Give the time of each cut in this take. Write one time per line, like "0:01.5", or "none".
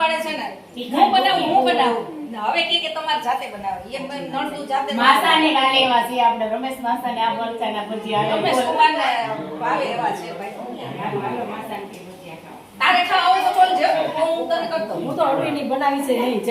none

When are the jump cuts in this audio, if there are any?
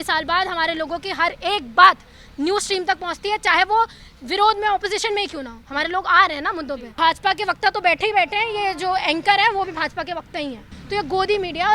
0:06.8
0:10.7

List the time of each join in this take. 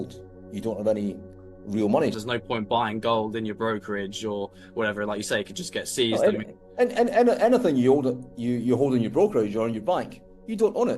0:02.2

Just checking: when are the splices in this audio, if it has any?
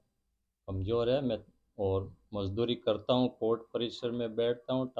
none

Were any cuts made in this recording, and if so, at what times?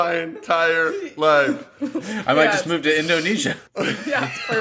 0:03.6

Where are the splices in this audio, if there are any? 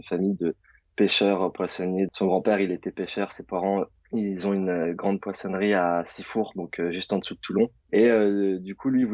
0:02.1
0:04.0
0:07.8

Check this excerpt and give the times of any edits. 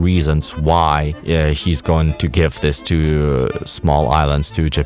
0:01.1
0:02.1

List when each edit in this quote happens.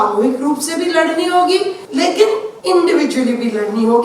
0:02.2

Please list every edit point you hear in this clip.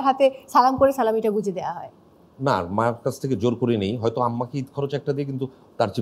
none

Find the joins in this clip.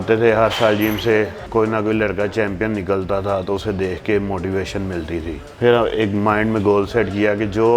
0:01.4
0:05.4

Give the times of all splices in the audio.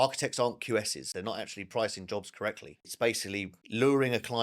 0:01.1
0:02.9
0:03.6

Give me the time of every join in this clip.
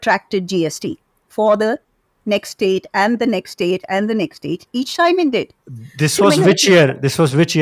none

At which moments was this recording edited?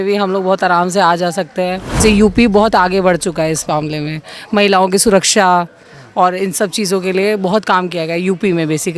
0:02.0

